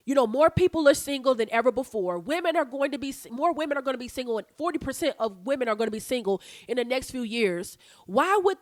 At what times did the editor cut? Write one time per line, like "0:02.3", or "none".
none